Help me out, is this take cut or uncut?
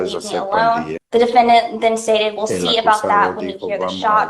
cut